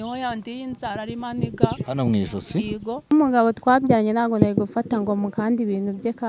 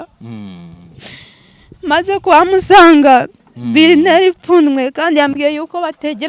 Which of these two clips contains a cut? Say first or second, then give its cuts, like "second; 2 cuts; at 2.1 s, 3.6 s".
first; 1 cut; at 3.1 s